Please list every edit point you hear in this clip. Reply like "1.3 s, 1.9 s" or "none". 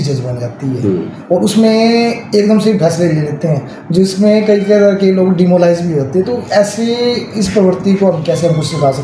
none